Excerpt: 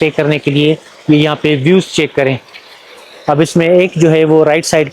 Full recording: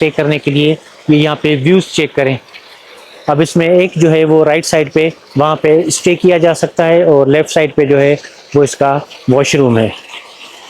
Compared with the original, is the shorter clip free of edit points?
yes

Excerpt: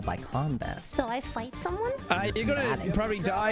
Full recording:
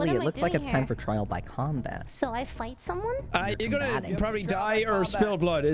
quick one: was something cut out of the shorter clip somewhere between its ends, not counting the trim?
no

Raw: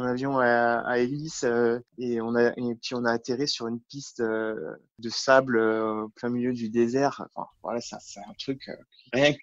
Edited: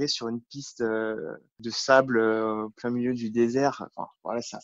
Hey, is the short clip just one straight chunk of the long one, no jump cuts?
yes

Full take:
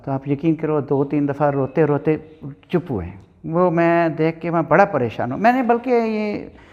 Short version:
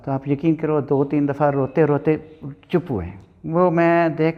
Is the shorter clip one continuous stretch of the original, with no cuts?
yes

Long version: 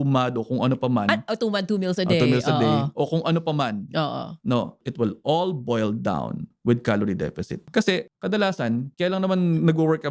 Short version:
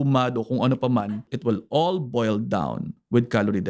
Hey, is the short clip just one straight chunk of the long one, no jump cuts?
no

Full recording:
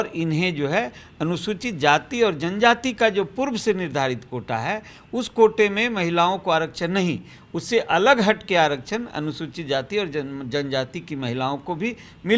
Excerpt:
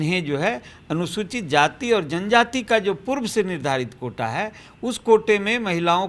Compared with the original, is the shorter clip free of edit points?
yes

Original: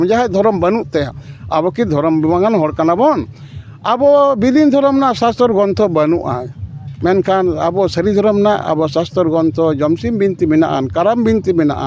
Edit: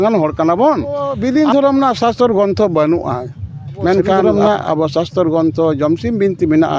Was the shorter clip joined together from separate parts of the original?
yes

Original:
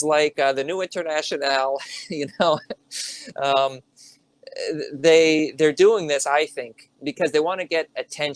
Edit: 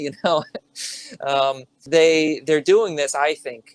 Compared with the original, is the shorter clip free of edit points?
no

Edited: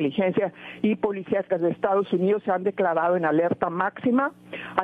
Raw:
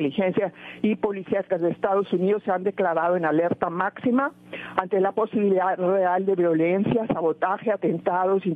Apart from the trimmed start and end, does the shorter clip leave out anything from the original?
no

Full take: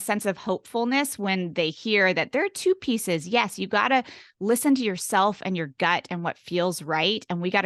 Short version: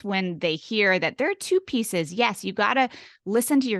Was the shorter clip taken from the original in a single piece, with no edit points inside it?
yes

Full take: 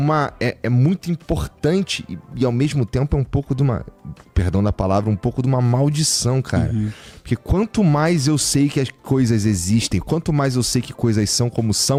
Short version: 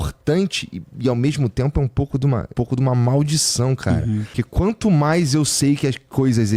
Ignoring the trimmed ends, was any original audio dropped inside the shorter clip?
yes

